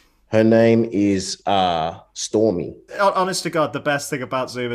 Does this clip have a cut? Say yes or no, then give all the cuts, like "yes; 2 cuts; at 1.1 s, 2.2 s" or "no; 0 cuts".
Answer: yes; 1 cut; at 2.9 s